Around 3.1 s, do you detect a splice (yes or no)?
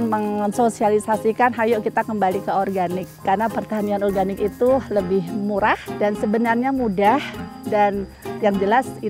yes